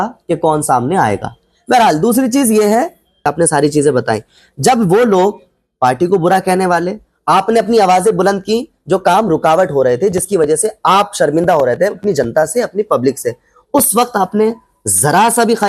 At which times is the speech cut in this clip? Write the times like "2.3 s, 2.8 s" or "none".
3.3 s